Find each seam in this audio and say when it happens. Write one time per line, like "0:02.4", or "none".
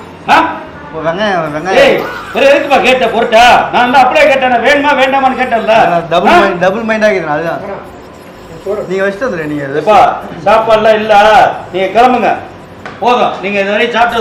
none